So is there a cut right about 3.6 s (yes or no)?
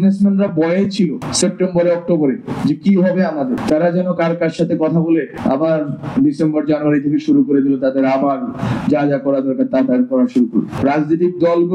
yes